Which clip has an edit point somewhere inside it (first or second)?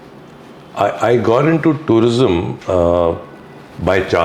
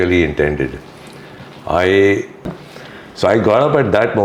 second